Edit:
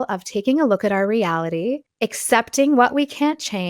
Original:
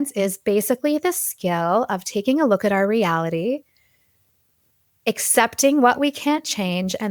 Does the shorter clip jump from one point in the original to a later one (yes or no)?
yes